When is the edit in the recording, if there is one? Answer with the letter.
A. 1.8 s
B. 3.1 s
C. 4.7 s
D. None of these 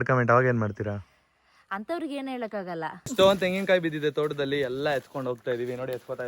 B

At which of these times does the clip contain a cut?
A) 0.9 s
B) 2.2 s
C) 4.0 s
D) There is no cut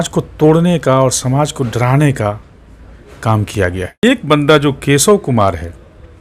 C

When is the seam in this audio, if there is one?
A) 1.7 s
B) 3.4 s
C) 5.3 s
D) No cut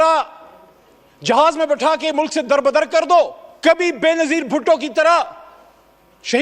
B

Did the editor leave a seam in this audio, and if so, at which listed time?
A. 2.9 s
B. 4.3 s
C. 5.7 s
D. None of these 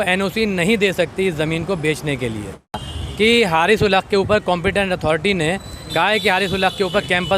A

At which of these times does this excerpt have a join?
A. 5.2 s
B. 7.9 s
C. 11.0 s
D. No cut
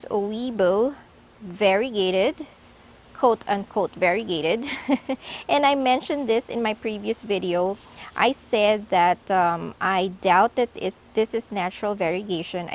D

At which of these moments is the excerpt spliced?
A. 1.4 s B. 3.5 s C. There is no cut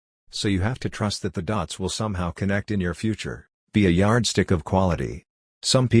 B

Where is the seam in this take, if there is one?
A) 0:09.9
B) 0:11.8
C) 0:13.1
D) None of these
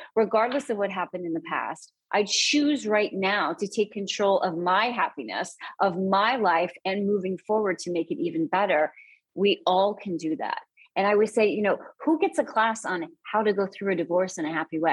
D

